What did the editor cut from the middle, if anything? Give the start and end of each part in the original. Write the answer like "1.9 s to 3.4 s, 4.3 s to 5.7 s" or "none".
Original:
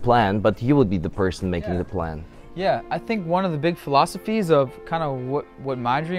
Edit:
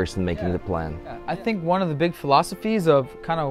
2.5 s to 2.8 s